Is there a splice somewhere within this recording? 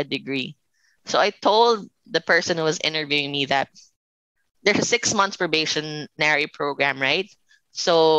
yes; 2 cuts; at 1.9 s, 4.5 s

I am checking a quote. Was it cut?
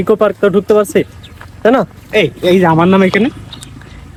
no; 0 cuts

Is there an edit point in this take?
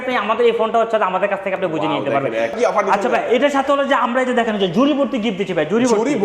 yes; 1 cut; at 2.5 s

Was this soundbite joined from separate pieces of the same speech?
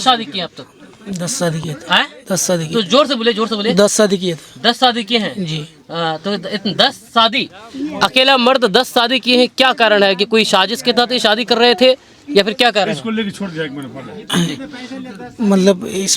no; 0 cuts

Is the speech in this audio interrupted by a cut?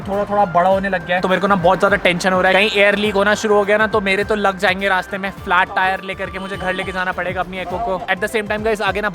no; 0 cuts

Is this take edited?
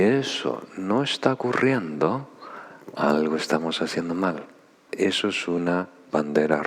yes; 1 cut; at 4.9 s

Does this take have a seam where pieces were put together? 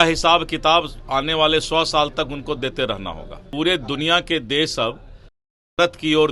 yes; 1 cut; at 3.4 s

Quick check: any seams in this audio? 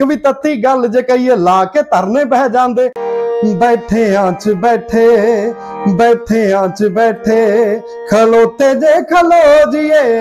yes; 1 cut; at 3.0 s

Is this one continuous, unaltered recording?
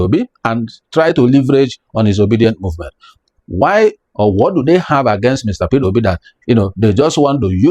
no; 1 cut; at 3.0 s

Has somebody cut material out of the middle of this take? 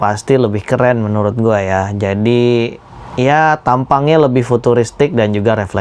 no; 0 cuts

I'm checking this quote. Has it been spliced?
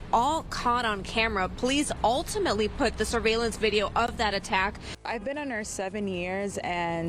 yes; 1 cut; at 4.9 s

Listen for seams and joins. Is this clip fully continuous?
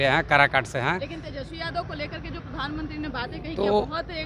yes; 0 cuts

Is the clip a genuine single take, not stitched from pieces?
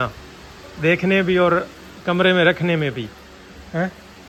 yes; 0 cuts

